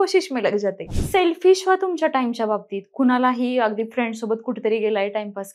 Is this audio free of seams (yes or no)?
no